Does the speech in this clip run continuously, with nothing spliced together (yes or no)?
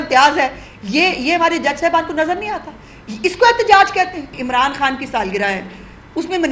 no